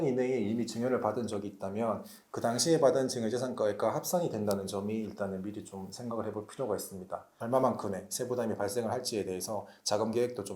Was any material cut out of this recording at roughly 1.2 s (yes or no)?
no